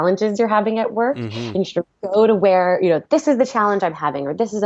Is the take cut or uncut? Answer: uncut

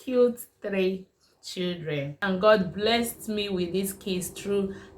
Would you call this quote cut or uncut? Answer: cut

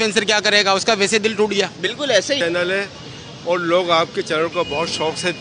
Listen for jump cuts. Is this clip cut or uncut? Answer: cut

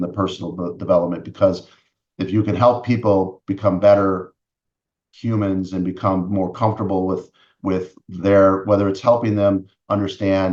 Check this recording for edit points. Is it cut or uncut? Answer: uncut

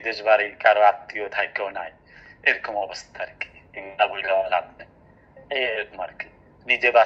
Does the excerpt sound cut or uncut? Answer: uncut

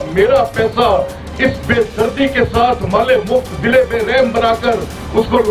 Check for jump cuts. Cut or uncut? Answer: uncut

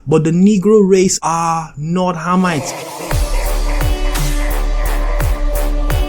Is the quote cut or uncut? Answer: cut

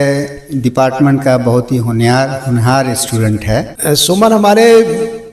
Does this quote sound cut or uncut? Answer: cut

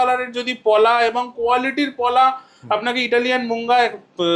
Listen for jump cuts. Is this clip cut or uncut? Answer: uncut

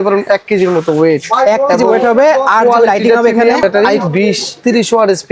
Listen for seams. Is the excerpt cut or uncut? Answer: cut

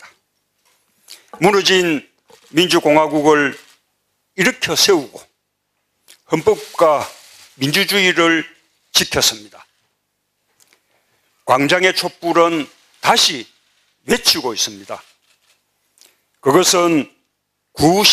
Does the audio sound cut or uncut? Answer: uncut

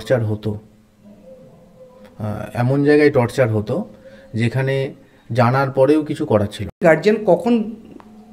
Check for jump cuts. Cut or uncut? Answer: cut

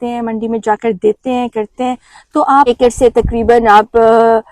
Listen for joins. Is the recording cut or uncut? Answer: cut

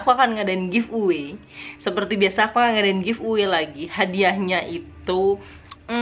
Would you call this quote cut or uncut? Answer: cut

